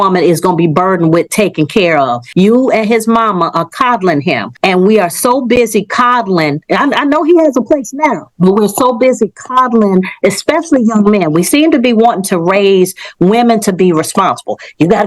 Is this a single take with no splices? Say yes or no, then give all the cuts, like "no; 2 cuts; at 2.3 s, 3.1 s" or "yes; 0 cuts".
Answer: no; 2 cuts; at 2.2 s, 4.5 s